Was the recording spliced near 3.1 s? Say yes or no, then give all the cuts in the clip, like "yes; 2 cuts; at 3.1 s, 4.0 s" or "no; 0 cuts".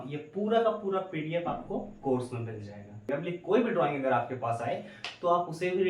yes; 1 cut; at 3.1 s